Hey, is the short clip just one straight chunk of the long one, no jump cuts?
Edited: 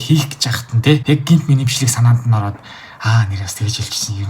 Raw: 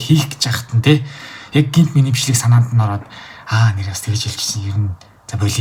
no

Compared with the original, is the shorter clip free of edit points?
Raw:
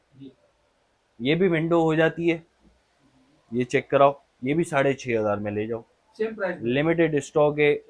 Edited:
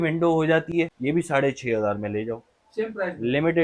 no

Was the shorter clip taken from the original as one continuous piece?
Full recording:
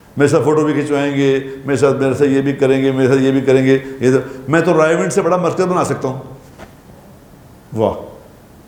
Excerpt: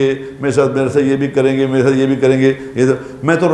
yes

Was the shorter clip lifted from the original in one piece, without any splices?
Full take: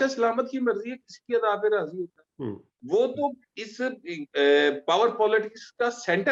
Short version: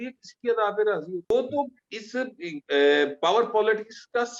no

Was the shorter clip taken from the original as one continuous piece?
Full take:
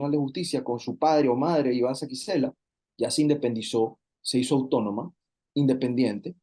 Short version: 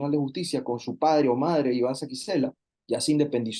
no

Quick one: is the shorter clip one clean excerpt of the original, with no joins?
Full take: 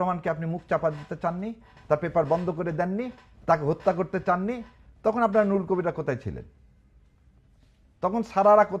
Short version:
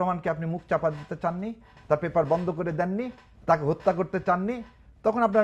yes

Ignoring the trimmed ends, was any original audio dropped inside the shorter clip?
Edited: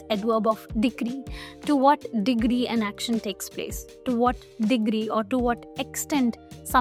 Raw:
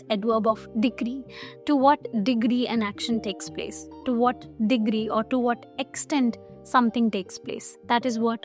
no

